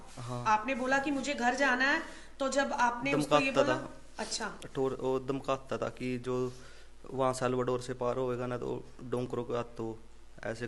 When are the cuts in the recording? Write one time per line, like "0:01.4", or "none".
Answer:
none